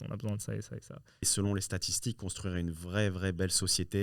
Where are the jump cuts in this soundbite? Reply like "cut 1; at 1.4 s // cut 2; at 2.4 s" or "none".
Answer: cut 1; at 1.3 s